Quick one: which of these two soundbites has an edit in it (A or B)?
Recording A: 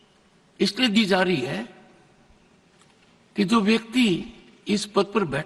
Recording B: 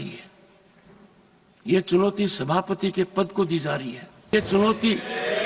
B